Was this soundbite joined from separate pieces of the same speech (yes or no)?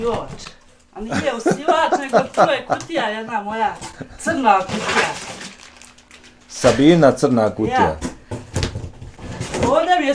no